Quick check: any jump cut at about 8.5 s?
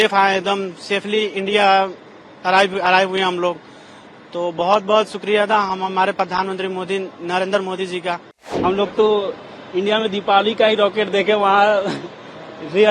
yes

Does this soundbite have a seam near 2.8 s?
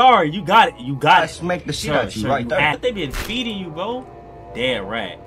yes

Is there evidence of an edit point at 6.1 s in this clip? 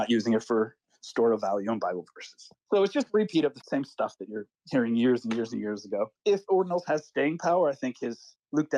yes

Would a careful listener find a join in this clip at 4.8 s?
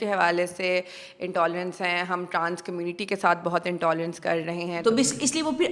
yes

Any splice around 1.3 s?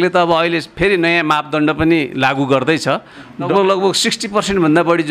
no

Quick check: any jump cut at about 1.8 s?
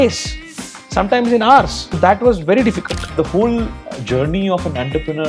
yes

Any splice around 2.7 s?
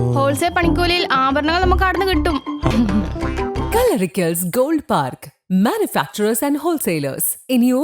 yes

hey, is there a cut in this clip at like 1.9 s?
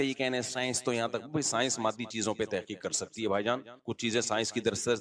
no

